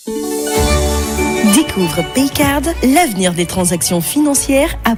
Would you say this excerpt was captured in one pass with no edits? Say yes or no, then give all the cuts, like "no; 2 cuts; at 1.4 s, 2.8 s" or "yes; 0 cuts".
yes; 0 cuts